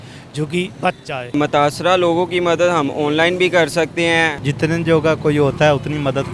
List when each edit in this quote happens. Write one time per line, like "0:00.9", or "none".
0:01.3
0:04.4